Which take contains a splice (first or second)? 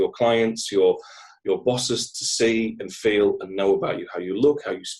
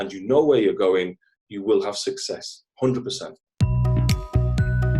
second